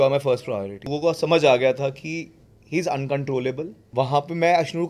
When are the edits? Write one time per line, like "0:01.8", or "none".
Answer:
0:00.9
0:03.7

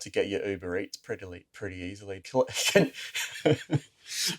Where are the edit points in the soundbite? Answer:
0:02.2

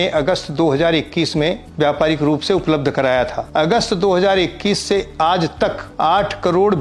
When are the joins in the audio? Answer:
0:01.7
0:03.4
0:05.8

